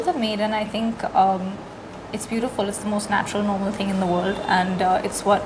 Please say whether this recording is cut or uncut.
uncut